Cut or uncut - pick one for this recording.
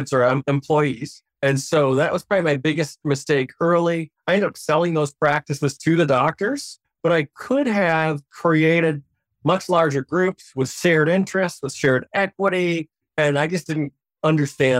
uncut